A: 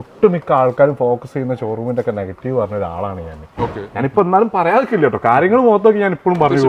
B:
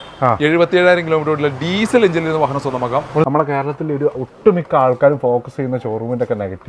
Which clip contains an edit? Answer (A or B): B